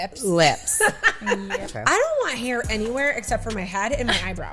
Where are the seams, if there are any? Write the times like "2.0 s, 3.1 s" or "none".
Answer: 1.6 s